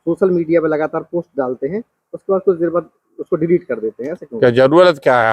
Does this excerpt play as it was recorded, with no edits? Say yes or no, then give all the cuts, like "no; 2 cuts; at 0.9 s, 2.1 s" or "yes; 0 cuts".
yes; 0 cuts